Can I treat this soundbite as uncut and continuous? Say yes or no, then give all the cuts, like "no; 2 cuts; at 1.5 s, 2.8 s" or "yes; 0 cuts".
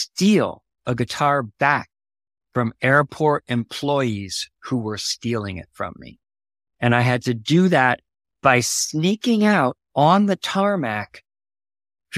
yes; 0 cuts